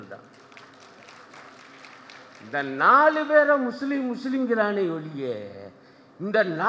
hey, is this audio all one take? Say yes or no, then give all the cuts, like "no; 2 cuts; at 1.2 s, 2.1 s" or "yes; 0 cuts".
yes; 0 cuts